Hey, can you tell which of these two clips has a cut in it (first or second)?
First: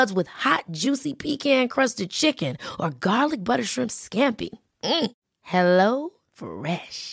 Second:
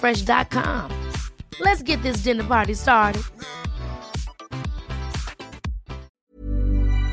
second